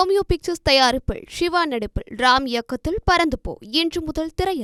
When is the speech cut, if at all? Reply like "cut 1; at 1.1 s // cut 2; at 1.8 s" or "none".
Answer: none